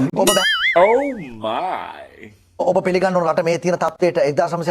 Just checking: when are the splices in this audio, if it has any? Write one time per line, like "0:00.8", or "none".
0:02.6

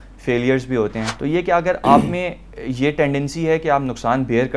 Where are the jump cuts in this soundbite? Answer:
0:01.1

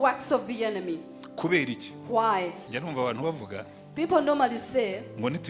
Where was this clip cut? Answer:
0:02.6

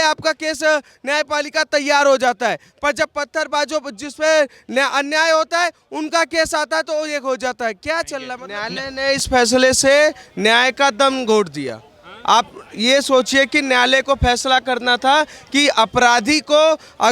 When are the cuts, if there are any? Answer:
0:08.4

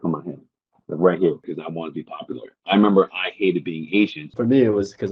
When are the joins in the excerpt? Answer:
0:01.6
0:04.3

